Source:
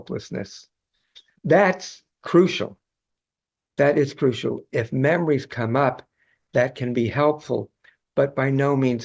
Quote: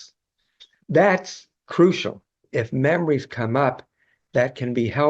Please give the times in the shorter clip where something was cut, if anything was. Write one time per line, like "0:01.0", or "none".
0:02.4